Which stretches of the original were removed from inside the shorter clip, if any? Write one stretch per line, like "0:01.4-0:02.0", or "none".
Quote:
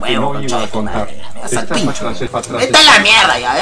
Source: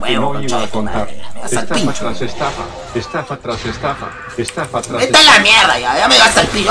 0:02.3-0:04.7